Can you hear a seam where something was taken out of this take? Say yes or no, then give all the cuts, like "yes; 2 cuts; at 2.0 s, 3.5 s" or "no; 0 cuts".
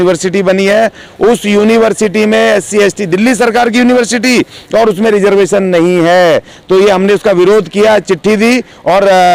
no; 0 cuts